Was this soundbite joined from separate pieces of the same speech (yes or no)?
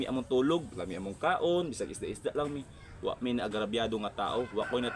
no